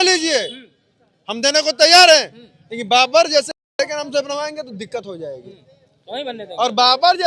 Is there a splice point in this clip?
no; 0 cuts

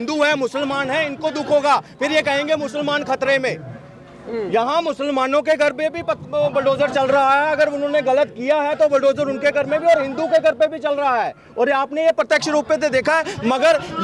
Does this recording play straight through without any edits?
yes; 0 cuts

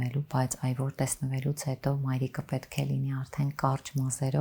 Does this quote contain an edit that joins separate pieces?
no; 0 cuts

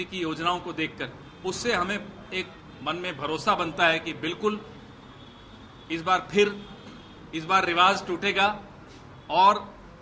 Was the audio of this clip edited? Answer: no; 0 cuts

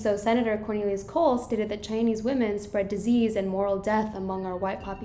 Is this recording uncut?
yes; 0 cuts

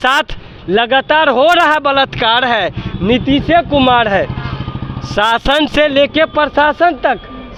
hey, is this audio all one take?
yes; 0 cuts

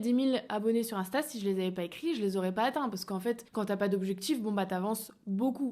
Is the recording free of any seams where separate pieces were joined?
no; 1 cut; at 3.5 s

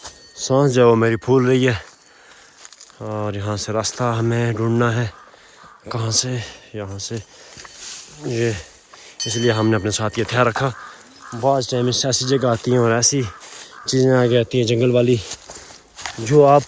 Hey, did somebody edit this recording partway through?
no; 0 cuts

